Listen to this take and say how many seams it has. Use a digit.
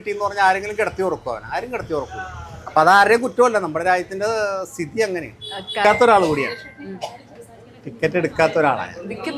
1